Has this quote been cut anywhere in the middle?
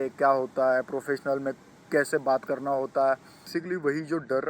yes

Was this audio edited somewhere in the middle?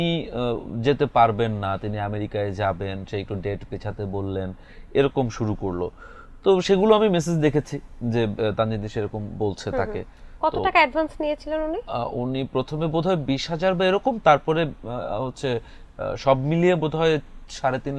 no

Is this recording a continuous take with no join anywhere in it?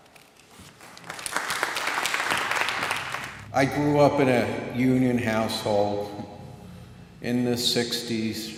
yes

